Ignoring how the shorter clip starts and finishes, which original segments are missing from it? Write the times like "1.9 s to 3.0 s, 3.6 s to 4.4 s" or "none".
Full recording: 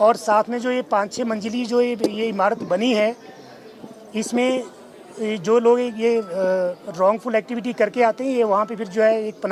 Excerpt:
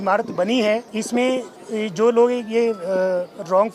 3.2 s to 4.1 s, 4.8 s to 5.0 s